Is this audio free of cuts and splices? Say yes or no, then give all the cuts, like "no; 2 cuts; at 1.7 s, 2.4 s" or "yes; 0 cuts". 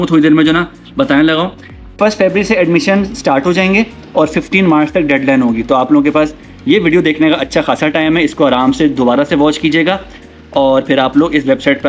no; 1 cut; at 2.0 s